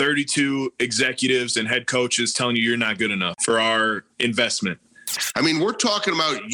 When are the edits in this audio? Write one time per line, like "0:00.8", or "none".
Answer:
0:03.3
0:05.1